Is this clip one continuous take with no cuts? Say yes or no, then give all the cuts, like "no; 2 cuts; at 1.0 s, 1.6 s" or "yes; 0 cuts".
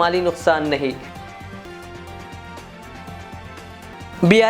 yes; 0 cuts